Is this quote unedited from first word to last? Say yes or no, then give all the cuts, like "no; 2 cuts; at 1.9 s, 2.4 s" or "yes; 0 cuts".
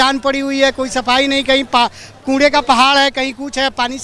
yes; 0 cuts